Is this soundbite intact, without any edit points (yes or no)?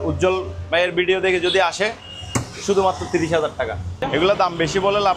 no